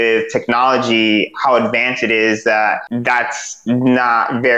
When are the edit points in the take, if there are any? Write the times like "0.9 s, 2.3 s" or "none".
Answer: 2.9 s